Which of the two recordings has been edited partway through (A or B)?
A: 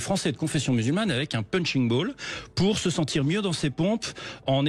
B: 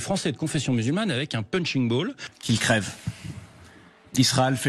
B